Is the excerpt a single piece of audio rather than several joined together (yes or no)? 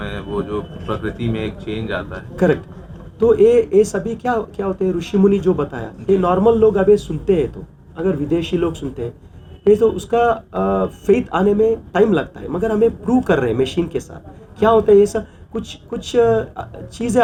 yes